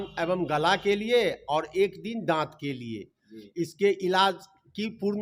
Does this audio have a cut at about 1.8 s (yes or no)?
no